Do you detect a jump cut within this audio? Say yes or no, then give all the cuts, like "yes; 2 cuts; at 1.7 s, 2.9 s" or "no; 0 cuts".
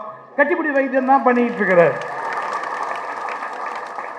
no; 0 cuts